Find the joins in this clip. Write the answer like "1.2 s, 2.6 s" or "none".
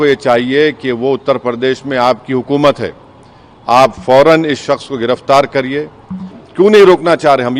6.4 s